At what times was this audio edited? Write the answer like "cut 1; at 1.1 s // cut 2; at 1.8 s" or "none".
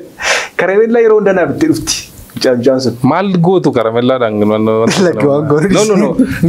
none